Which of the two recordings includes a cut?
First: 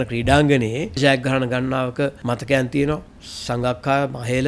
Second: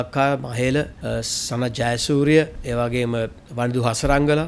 first; 2 cuts; at 1.0 s, 2.2 s

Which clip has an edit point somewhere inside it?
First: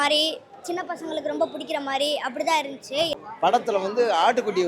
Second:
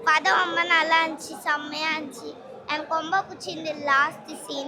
first; 1 cut; at 3.1 s

